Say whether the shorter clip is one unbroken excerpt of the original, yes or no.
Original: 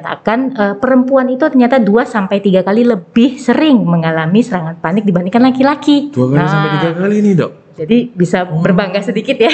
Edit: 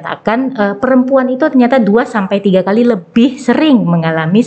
yes